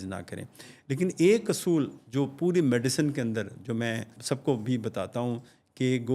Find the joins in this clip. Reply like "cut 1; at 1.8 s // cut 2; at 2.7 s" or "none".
cut 1; at 4.1 s